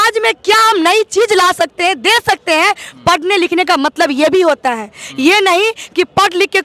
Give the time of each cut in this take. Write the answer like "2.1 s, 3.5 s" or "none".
none